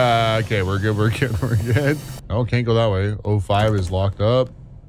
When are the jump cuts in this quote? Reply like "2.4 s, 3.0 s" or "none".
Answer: 2.1 s